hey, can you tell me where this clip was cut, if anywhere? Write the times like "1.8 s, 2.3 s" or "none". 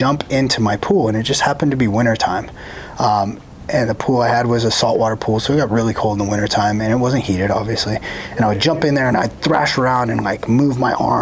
none